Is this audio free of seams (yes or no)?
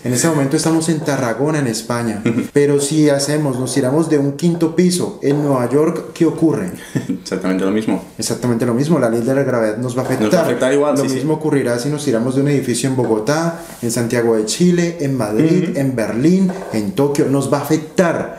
no